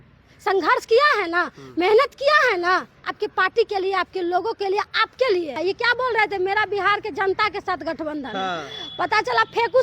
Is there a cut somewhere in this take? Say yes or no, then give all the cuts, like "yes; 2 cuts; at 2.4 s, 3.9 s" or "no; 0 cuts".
yes; 1 cut; at 5.6 s